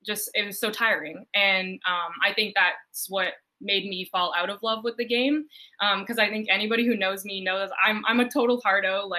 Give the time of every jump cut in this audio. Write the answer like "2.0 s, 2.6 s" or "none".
none

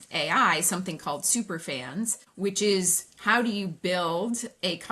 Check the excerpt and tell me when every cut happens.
2.2 s

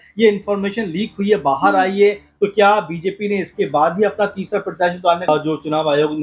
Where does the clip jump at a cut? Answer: 5.3 s

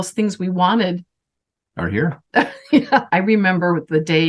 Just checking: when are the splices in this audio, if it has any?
3.1 s

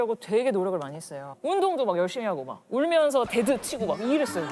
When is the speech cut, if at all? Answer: none

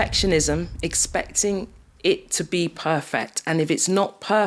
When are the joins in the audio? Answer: none

